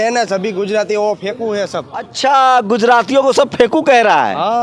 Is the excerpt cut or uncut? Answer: cut